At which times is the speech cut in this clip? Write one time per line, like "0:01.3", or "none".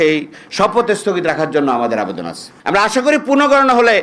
0:02.5

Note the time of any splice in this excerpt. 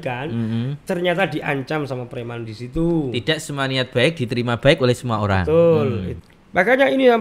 0:06.1

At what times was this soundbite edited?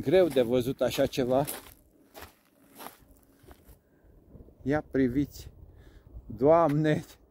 none

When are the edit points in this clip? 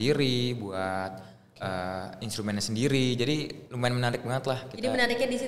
none

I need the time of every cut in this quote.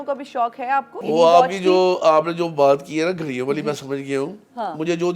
0:01.0

